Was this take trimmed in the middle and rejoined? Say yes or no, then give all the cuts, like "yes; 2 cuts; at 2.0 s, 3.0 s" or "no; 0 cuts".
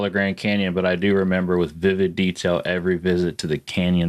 no; 0 cuts